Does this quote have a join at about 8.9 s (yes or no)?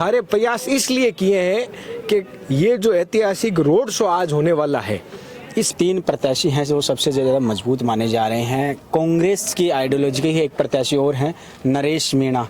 no